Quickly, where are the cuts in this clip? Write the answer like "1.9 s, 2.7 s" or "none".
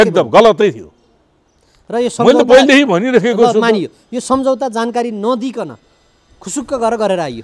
none